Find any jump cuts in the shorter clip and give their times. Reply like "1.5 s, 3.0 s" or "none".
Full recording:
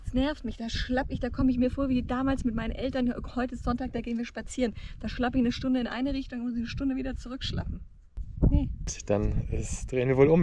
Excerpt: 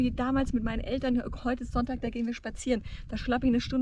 none